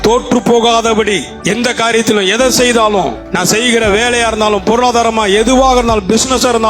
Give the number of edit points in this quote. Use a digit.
2